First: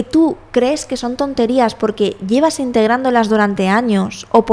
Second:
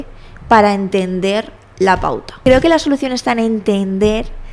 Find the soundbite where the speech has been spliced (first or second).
second